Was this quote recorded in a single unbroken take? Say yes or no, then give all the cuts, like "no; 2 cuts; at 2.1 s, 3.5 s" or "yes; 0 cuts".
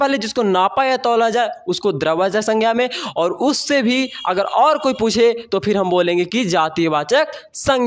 yes; 0 cuts